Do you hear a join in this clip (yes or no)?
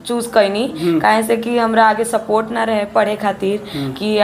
no